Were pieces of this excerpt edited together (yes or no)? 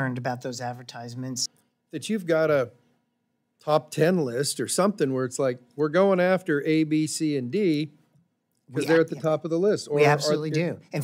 yes